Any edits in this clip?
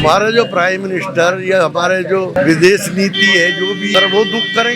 yes; 2 cuts; at 2.4 s, 3.9 s

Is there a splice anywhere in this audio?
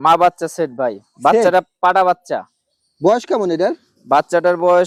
no; 0 cuts

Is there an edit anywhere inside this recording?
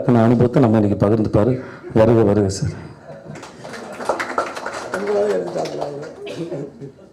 no; 0 cuts

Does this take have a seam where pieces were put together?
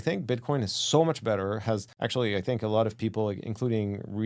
yes; 1 cut; at 1.9 s

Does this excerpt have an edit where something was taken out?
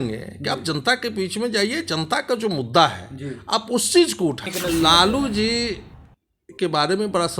yes; 1 cut; at 4.5 s

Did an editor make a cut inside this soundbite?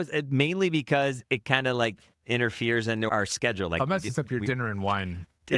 no; 0 cuts

